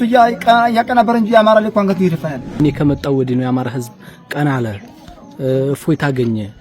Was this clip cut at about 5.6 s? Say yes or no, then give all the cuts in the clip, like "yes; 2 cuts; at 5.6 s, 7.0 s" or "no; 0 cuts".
no; 1 cut; at 2.6 s